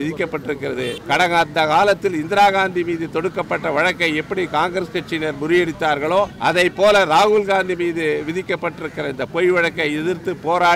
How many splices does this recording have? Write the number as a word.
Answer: two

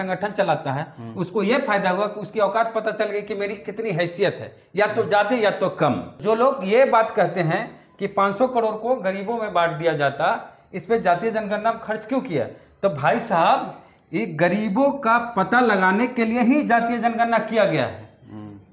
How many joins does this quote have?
one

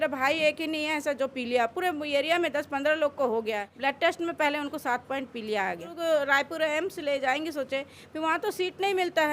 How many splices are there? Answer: two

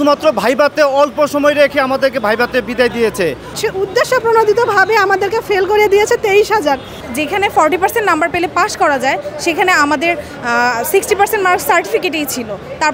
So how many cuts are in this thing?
two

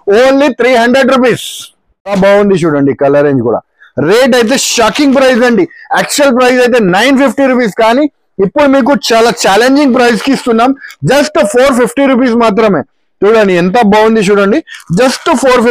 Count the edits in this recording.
one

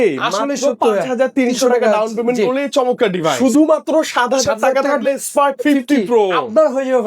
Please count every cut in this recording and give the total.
one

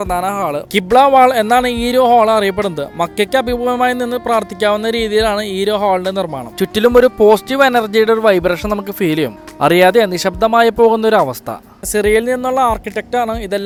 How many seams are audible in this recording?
zero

